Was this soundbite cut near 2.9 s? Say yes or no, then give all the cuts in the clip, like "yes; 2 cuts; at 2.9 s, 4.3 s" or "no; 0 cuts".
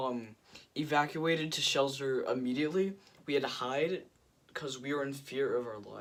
no; 0 cuts